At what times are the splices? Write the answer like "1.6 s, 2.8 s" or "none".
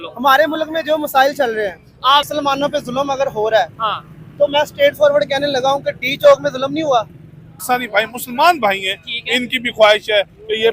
2.3 s, 7.6 s